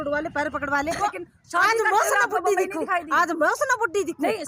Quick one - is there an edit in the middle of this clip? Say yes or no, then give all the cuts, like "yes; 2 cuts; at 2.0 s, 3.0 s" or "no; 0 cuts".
yes; 1 cut; at 1.0 s